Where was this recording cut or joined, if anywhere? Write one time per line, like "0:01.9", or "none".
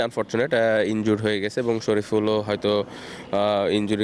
none